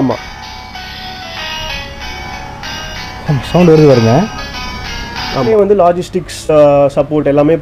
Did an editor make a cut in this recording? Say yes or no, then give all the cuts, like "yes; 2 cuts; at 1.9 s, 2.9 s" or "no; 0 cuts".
yes; 1 cut; at 5.5 s